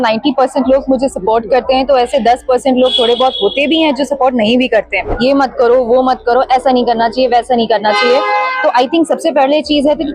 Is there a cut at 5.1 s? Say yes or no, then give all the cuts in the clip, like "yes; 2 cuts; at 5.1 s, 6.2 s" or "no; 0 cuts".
yes; 1 cut; at 5.1 s